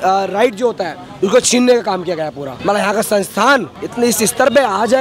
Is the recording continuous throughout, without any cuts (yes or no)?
no